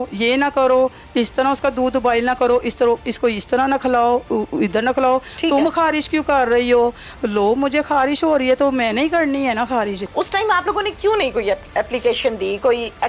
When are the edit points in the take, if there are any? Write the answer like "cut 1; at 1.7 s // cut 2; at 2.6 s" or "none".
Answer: cut 1; at 10.0 s